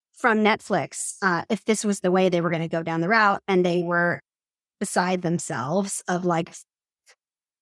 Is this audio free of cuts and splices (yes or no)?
yes